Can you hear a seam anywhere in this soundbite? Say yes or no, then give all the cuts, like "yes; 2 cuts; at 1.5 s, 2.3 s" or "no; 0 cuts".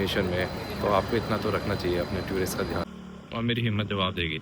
yes; 1 cut; at 2.9 s